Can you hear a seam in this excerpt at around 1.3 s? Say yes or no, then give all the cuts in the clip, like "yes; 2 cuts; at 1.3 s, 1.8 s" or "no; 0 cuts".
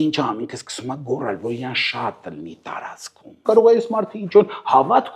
no; 1 cut; at 3.4 s